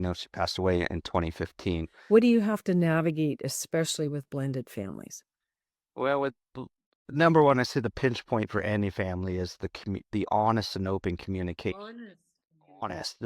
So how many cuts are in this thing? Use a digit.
1